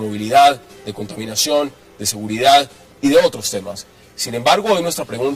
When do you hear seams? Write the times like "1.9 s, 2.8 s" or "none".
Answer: 0.9 s